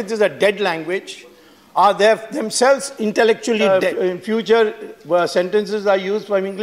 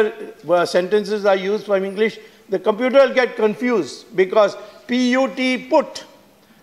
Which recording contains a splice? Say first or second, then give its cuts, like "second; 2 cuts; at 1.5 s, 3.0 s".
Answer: first; 1 cut; at 3.7 s